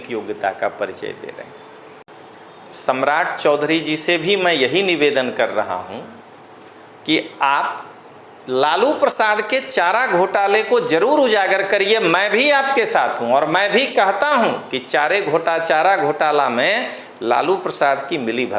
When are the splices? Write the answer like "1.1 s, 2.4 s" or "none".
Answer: 2.1 s